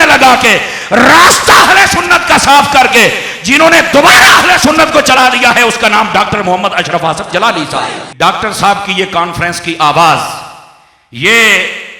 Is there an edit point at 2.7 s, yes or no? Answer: no